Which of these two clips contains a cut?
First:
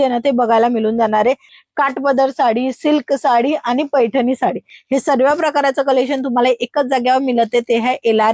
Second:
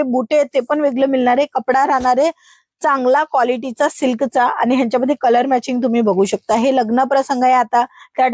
first; 1 cut; at 1.5 s

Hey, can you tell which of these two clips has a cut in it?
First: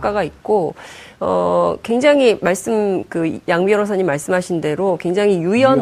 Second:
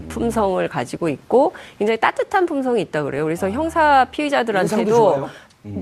first; 1 cut; at 2.4 s

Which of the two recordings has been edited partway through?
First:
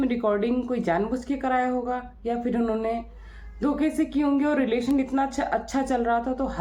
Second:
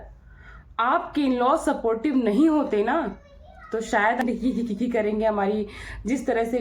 second; 1 cut; at 4.2 s

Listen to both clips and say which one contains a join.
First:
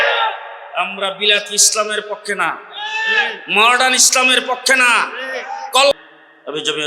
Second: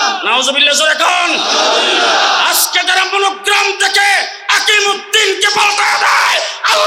first; 1 cut; at 5.9 s

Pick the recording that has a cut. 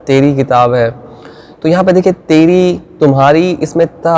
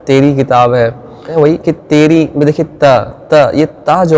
second; 1 cut; at 1.3 s

